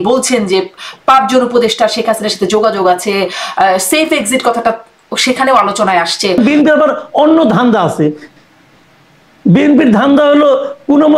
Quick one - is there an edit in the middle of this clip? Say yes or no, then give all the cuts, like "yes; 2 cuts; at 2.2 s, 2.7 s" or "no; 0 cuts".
yes; 1 cut; at 6.4 s